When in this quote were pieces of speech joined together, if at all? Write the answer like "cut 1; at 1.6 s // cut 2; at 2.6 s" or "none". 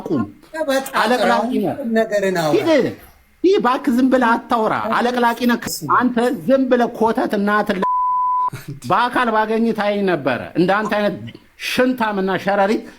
cut 1; at 5.6 s